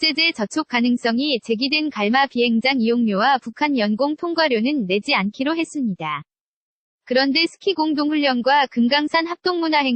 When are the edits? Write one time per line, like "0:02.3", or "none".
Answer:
none